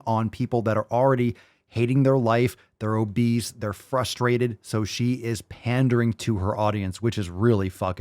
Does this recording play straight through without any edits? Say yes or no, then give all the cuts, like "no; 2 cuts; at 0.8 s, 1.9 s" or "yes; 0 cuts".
yes; 0 cuts